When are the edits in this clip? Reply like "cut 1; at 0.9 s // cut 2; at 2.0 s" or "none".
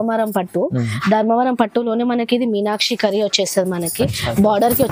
none